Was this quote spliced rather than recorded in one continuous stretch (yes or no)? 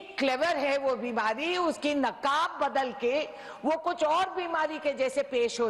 no